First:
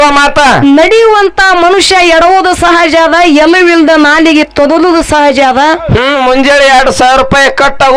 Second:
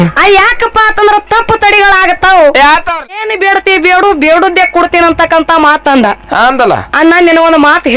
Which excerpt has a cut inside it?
second; 1 cut; at 3.3 s

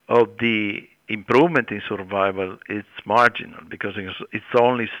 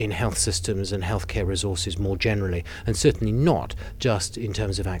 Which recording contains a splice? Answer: first; 2 cuts; at 1.1 s, 2.9 s

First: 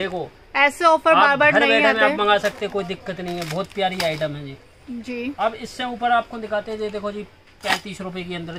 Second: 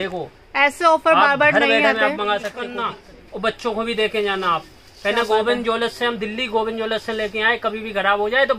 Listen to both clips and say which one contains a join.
second; 1 cut; at 2.8 s

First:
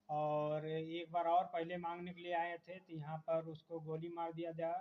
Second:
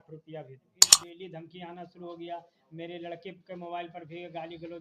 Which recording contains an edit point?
second; 1 cut; at 1.0 s

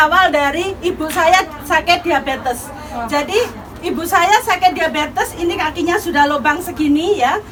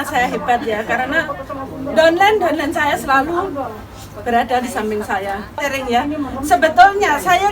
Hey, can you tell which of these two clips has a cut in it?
second; 1 cut; at 5.6 s

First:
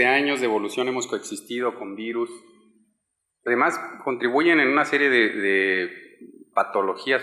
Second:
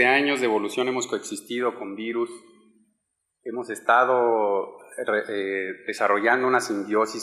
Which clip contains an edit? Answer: second; 1 cut; at 3.5 s

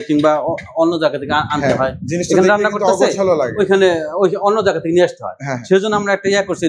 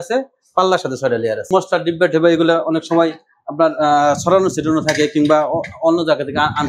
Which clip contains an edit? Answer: second; 1 cut; at 1.5 s

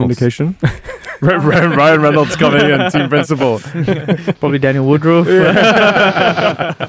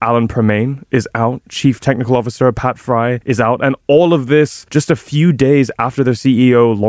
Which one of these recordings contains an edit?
second; 2 cuts; at 3.2 s, 4.6 s

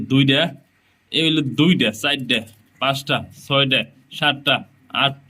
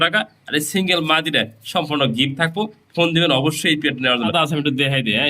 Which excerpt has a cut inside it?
second; 1 cut; at 4.3 s

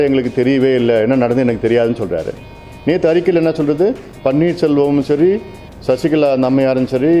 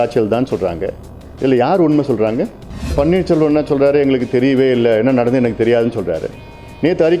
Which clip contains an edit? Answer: second; 1 cut; at 2.9 s

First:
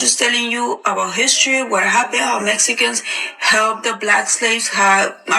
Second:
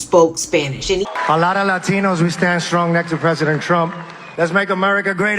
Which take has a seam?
second; 1 cut; at 1.0 s

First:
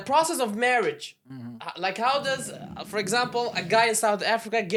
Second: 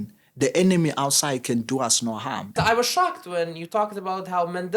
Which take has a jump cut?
second; 1 cut; at 2.5 s

